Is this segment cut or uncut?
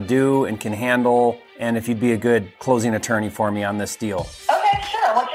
cut